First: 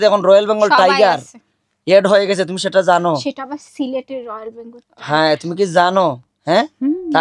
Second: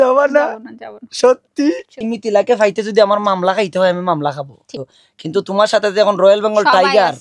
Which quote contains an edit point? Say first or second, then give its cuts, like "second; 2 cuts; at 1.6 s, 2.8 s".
second; 2 cuts; at 2.1 s, 4.9 s